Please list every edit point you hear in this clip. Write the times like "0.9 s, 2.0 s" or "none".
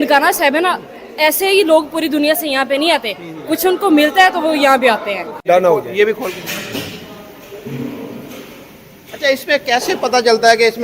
5.3 s